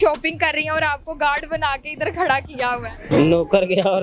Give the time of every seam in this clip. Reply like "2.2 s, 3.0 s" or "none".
3.1 s

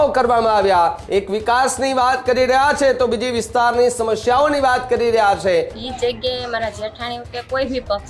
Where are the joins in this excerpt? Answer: 1.0 s, 5.8 s

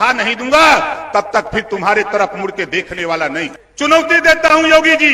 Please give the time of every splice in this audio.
3.6 s

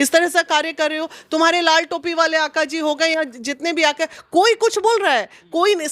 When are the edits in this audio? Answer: none

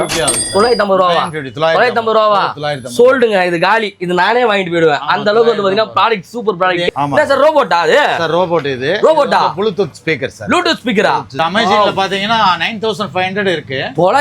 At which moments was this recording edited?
6.9 s

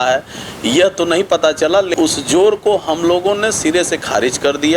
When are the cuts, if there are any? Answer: 1.9 s

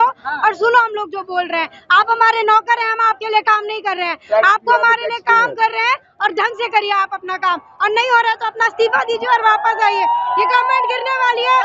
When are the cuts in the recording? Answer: none

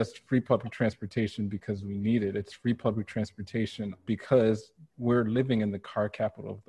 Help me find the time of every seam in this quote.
4.0 s

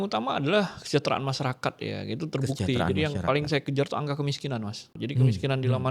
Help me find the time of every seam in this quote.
5.0 s

